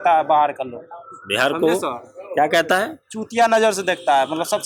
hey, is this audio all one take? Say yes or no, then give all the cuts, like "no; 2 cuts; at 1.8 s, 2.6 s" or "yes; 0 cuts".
yes; 0 cuts